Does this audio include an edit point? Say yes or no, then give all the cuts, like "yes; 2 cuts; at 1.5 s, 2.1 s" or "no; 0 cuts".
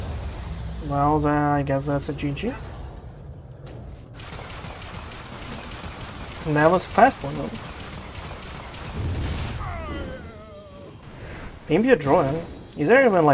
no; 0 cuts